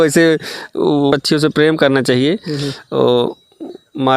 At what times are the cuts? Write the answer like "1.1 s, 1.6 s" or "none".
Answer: 1.1 s